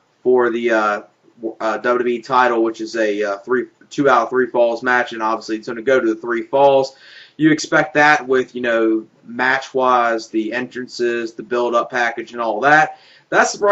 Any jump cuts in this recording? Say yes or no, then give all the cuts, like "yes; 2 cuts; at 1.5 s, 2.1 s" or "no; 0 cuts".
yes; 1 cut; at 4.9 s